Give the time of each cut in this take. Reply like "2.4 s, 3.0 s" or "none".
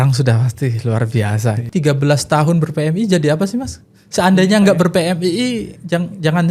1.6 s